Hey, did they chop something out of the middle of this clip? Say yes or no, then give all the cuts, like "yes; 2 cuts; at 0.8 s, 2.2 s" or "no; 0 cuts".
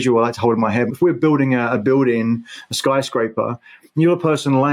yes; 1 cut; at 0.9 s